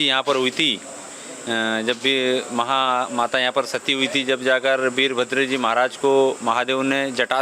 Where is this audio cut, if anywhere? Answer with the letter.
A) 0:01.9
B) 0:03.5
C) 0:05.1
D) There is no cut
D